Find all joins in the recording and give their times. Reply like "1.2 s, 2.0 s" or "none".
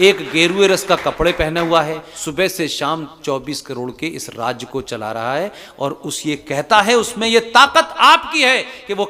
2.1 s